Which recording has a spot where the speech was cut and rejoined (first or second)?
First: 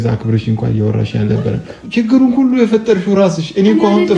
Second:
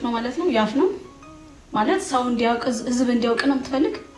first